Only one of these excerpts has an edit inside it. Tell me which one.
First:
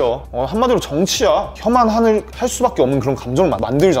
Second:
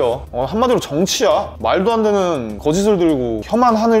first; 1 cut; at 1.5 s

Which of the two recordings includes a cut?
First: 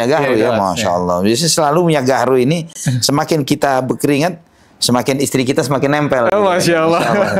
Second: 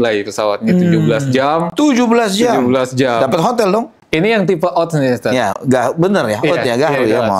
second; 1 cut; at 4.0 s

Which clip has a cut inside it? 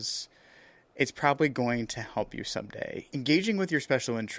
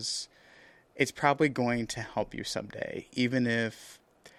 first; 1 cut; at 3.0 s

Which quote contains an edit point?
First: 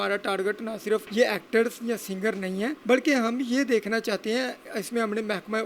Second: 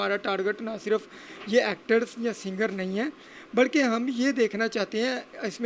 first; 2 cuts; at 1.1 s, 2.8 s

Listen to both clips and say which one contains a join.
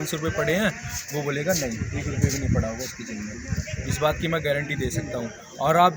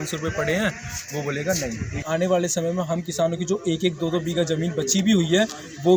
second; 1 cut; at 2.0 s

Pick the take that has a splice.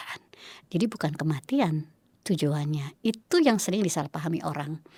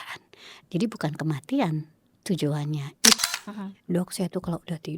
second; 1 cut; at 3.2 s

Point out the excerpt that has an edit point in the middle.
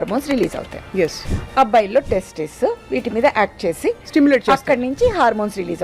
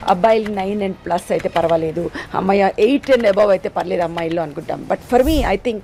first; 1 cut; at 1.3 s

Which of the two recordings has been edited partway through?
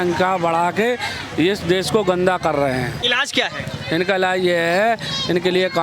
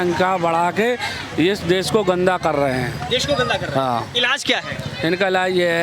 first; 1 cut; at 3.0 s

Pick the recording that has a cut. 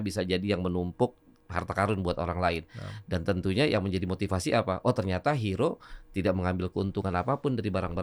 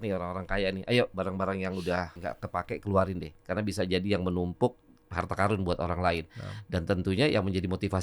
second; 1 cut; at 2.2 s

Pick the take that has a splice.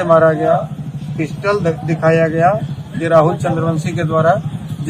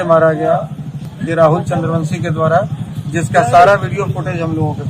second; 1 cut; at 1.0 s

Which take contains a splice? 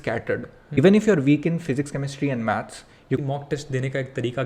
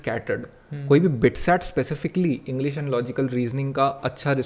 first; 2 cuts; at 0.8 s, 3.2 s

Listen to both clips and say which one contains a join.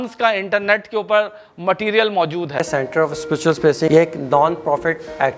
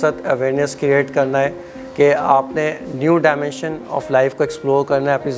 first; 2 cuts; at 2.7 s, 3.9 s

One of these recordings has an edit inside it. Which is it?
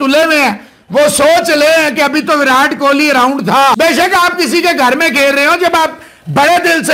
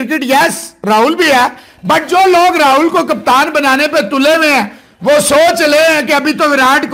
first; 1 cut; at 3.8 s

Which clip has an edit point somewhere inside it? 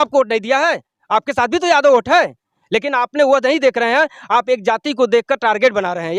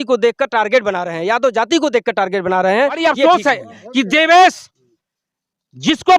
second; 1 cut; at 3.0 s

